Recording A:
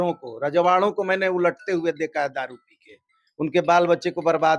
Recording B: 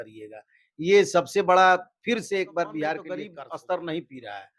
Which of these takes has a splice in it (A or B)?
B